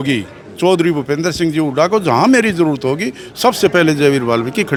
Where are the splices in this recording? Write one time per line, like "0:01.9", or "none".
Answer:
none